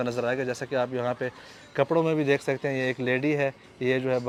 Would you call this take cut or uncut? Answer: uncut